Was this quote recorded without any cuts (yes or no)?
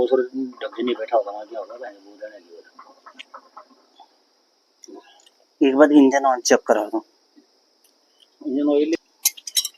yes